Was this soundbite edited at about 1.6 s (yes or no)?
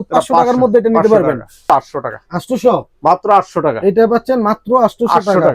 yes